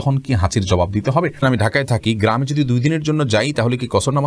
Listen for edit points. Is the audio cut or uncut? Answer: cut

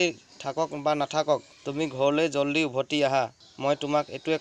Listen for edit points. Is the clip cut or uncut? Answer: cut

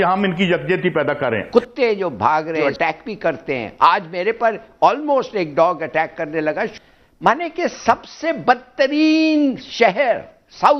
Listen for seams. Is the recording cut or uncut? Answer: cut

